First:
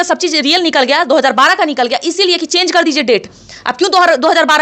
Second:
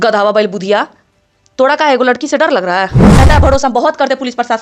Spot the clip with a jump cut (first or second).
second